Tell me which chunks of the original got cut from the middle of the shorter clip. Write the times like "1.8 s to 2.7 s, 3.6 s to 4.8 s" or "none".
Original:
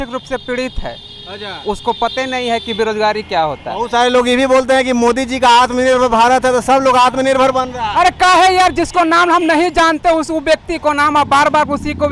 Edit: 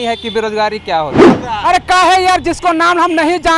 3.8 s to 7.6 s